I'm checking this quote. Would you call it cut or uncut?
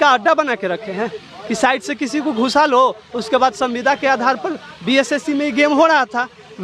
uncut